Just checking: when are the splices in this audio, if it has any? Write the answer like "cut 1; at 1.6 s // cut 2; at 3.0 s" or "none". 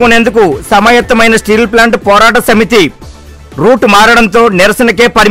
none